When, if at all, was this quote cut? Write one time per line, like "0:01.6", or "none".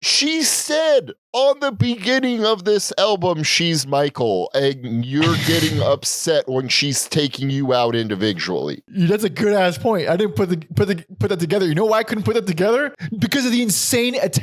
0:08.8
0:13.0